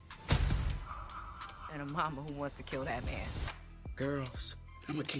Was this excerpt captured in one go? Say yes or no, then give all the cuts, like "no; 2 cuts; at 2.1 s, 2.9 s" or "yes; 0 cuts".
yes; 0 cuts